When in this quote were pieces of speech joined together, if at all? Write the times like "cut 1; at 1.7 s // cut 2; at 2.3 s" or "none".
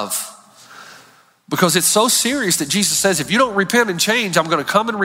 none